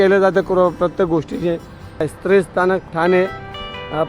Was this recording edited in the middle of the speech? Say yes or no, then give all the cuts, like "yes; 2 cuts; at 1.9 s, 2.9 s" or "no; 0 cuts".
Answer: yes; 1 cut; at 2.1 s